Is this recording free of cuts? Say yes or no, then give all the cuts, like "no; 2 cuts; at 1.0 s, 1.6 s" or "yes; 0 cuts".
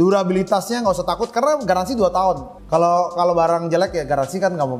yes; 0 cuts